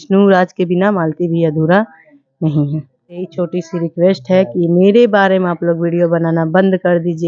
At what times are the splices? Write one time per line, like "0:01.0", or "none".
0:03.2